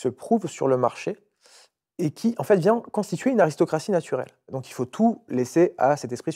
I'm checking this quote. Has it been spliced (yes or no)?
yes